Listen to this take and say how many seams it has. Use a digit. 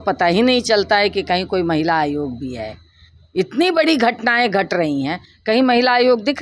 0